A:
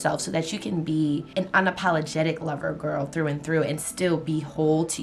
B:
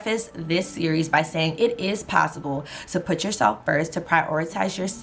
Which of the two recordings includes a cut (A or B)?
A